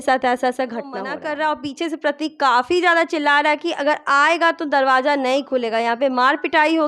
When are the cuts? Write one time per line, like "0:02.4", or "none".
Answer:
0:01.1